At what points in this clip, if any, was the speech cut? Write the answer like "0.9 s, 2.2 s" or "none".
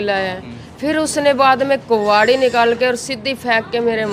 none